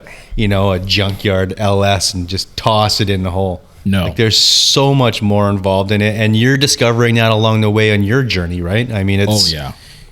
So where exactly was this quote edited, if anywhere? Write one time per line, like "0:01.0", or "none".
0:06.6
0:08.3